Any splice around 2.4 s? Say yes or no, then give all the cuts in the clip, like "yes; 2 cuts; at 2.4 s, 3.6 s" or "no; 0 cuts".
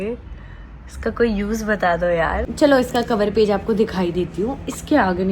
yes; 1 cut; at 2.4 s